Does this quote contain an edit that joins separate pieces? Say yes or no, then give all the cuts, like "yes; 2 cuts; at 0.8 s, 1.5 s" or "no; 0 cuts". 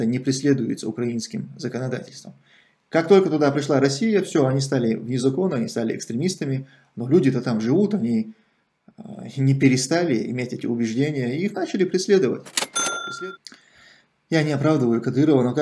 yes; 1 cut; at 12.5 s